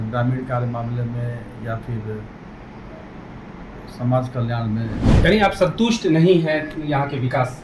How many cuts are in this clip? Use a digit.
1